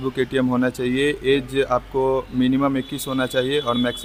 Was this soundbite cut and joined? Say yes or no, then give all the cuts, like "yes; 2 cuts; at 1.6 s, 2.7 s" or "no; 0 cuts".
no; 0 cuts